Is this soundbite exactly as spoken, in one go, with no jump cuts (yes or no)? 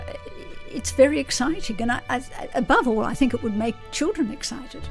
yes